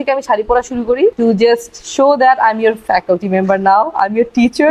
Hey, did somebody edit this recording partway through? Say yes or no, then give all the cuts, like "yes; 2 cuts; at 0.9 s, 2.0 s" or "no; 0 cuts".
yes; 1 cut; at 1.2 s